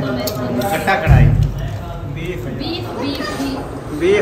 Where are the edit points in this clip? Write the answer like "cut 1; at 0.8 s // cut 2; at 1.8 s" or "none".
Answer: none